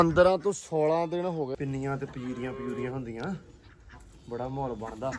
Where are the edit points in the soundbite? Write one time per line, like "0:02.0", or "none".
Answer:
0:01.5